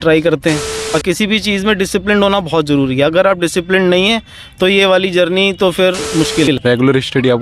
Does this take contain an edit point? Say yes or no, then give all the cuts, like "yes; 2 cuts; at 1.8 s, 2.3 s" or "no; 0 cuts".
yes; 2 cuts; at 0.9 s, 6.5 s